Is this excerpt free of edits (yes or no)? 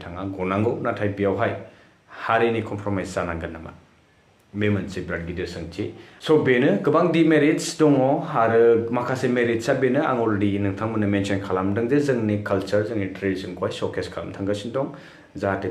no